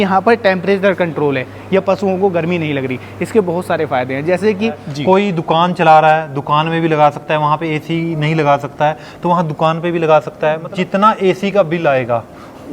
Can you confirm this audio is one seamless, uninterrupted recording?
no; 2 cuts; at 4.9 s, 10.6 s

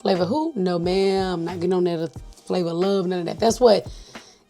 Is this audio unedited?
yes; 0 cuts

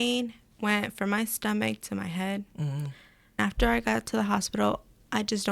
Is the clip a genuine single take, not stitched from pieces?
no; 1 cut; at 3.4 s

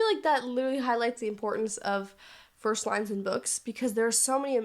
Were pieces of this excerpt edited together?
no; 0 cuts

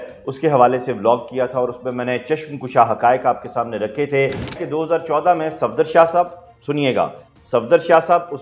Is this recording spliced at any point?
yes; 1 cut; at 4.5 s

